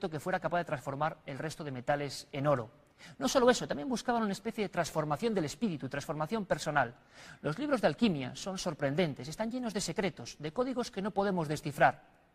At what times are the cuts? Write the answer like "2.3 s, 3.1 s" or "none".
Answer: none